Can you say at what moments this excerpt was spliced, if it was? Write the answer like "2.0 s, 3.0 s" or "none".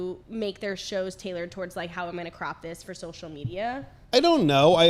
none